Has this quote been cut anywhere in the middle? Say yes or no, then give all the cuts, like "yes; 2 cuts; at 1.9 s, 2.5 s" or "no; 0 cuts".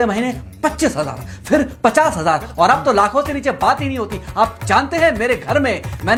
no; 0 cuts